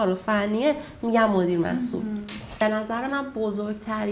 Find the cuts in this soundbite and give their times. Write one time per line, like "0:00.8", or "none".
0:02.6